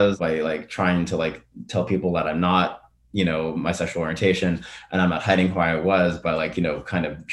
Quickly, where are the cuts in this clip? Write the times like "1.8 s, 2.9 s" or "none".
none